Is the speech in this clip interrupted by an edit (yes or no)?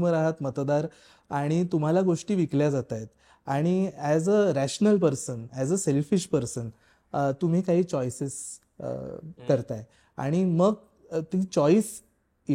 no